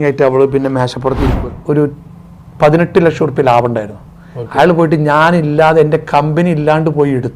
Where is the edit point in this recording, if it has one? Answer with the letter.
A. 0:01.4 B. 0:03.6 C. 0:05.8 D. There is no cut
A